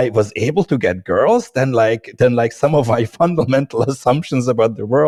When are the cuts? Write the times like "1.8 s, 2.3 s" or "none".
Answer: none